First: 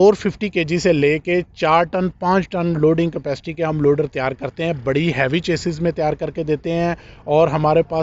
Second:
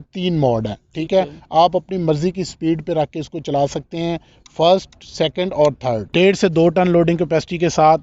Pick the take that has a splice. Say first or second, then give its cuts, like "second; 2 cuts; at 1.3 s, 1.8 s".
second; 1 cut; at 6.1 s